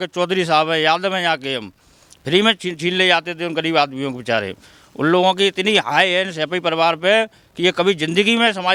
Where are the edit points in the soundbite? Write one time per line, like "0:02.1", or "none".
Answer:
none